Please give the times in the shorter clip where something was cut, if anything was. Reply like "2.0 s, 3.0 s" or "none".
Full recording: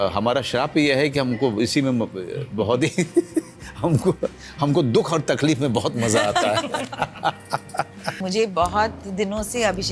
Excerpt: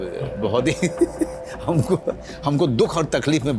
none